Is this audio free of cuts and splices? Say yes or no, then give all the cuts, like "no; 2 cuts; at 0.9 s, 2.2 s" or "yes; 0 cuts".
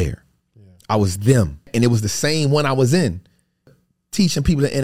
no; 2 cuts; at 1.7 s, 3.7 s